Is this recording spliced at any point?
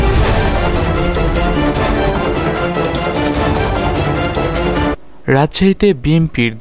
no; 0 cuts

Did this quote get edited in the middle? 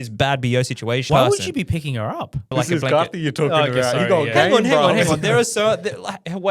yes; 2 cuts; at 1.0 s, 2.5 s

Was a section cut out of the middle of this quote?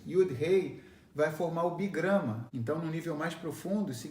yes; 1 cut; at 2.5 s

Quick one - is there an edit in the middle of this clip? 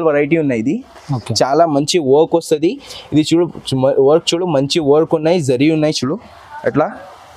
no; 0 cuts

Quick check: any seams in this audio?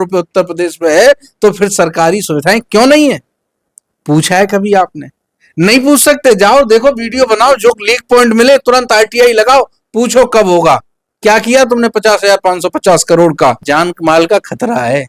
yes; 1 cut; at 13.6 s

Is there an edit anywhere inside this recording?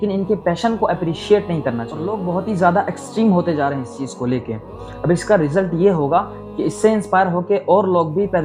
yes; 1 cut; at 2.0 s

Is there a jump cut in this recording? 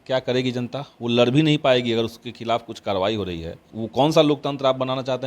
yes; 1 cut; at 3.7 s

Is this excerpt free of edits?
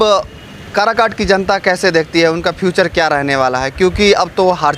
yes; 0 cuts

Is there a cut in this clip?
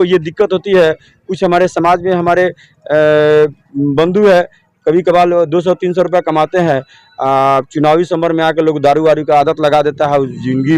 no; 0 cuts

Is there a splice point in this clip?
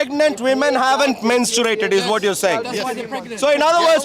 no; 0 cuts

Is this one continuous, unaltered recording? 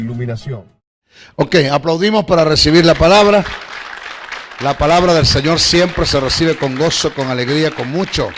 yes; 0 cuts

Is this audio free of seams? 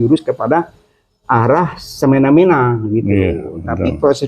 yes; 0 cuts

